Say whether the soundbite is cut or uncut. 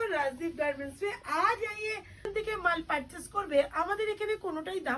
cut